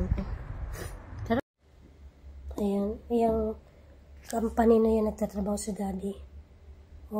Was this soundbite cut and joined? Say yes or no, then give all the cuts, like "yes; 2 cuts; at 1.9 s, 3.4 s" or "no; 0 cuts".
yes; 1 cut; at 1.4 s